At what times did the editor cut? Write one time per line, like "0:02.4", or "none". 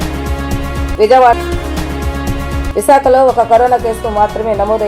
0:01.3